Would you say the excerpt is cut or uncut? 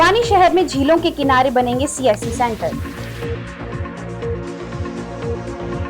cut